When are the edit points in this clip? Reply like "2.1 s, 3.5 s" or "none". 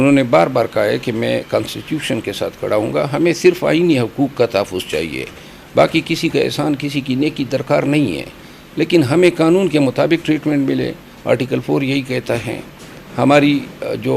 none